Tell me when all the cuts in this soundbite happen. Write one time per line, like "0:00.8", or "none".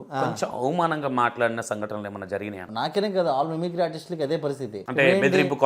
0:02.6
0:04.7